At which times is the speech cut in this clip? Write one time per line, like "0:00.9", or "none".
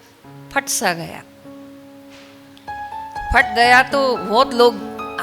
none